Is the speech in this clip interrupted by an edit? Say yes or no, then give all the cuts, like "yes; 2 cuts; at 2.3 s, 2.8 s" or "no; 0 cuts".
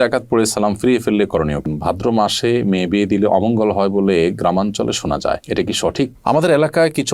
yes; 2 cuts; at 1.6 s, 6.2 s